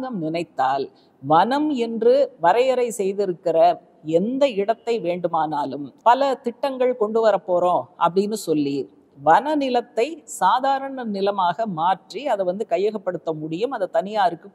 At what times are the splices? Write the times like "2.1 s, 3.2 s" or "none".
2.3 s, 5.8 s